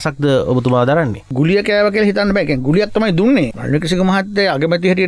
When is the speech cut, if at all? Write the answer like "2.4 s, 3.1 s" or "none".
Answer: 1.3 s, 3.5 s